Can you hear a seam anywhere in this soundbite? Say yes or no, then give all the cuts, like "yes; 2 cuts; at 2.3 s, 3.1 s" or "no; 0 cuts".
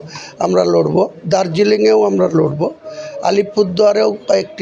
no; 0 cuts